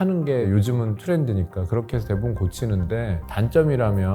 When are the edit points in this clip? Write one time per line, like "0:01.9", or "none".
0:03.2

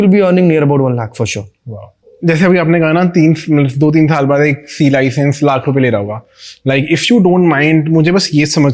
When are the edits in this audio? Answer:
0:02.0

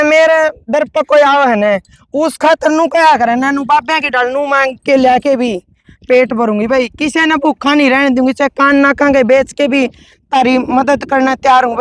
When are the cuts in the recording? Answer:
none

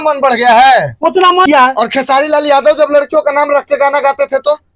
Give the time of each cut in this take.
0:01.4

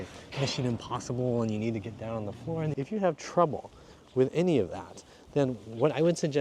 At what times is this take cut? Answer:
0:02.8

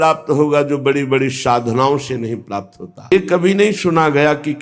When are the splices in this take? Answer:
0:03.1

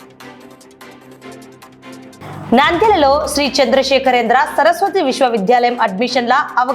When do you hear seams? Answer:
0:01.1

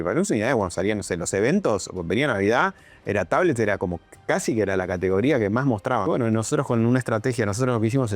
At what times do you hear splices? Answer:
0:06.1

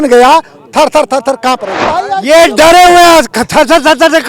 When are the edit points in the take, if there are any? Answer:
0:01.9

